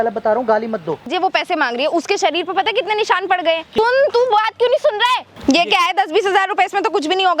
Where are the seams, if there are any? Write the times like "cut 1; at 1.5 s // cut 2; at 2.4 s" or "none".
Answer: cut 1; at 1.0 s // cut 2; at 3.7 s // cut 3; at 5.3 s